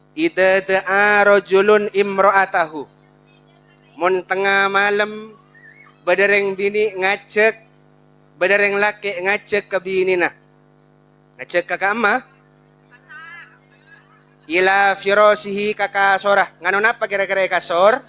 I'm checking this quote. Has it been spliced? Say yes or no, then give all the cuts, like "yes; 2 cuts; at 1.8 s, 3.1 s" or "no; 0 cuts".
no; 0 cuts